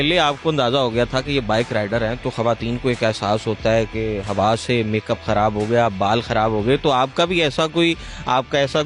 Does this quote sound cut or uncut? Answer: uncut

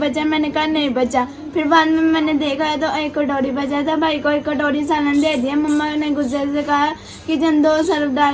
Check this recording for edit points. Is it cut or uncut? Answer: uncut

